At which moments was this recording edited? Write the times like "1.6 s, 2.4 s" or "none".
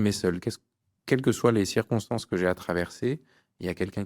none